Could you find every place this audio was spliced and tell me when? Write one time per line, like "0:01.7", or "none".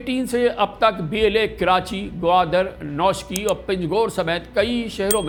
none